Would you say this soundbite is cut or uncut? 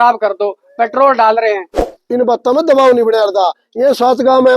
cut